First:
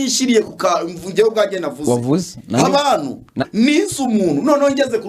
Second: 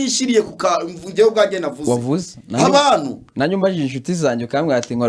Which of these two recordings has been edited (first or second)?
first